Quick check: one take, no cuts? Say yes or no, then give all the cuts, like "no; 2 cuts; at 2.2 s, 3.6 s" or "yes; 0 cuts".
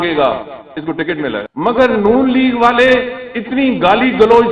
no; 1 cut; at 1.5 s